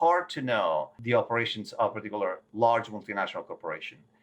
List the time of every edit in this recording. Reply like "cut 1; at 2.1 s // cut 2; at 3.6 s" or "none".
cut 1; at 1.0 s // cut 2; at 2.4 s